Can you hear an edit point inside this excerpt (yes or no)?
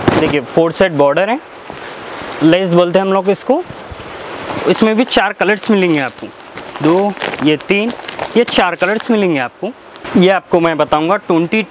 no